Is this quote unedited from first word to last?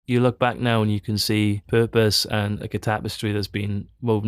no; 1 cut; at 1.6 s

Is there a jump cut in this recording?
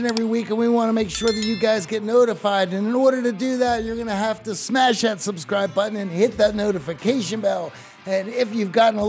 no; 0 cuts

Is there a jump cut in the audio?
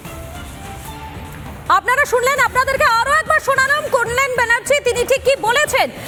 no; 0 cuts

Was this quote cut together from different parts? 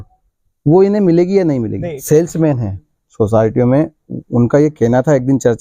yes; 1 cut; at 2.0 s

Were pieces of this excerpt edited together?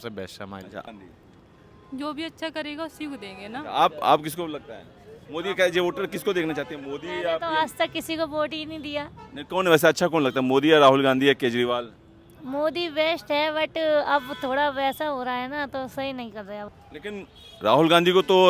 yes; 1 cut; at 16.7 s

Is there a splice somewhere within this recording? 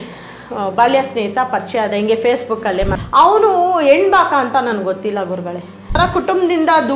yes; 2 cuts; at 3.0 s, 6.0 s

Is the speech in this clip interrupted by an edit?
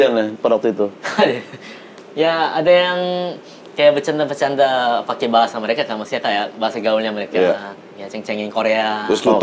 no; 0 cuts

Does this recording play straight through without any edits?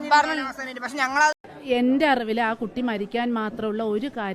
no; 1 cut; at 1.3 s

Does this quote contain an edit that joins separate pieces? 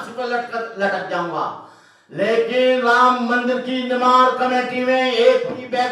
no; 0 cuts

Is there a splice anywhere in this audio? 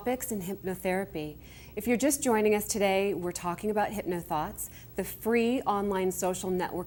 no; 0 cuts

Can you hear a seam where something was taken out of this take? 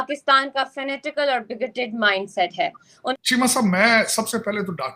yes; 1 cut; at 3.1 s

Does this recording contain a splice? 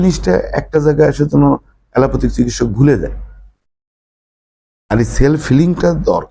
no; 0 cuts

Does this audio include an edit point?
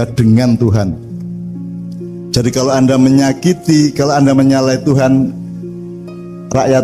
yes; 2 cuts; at 1.0 s, 2.3 s

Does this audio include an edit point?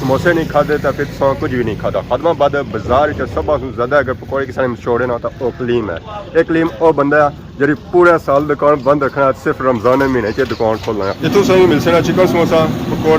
yes; 1 cut; at 11.2 s

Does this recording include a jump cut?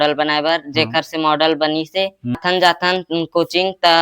yes; 1 cut; at 2.4 s

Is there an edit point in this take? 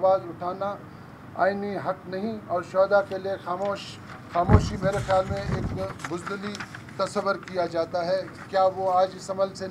no; 0 cuts

